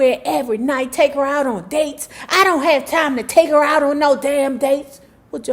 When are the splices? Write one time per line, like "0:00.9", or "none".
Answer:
none